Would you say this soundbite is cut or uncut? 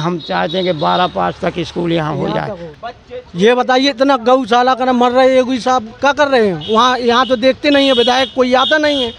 cut